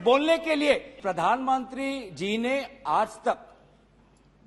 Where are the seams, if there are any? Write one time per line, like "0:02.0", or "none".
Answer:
0:01.0